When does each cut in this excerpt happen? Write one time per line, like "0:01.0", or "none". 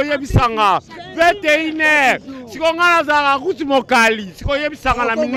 none